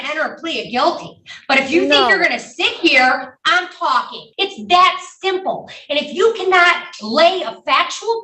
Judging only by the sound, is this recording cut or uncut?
cut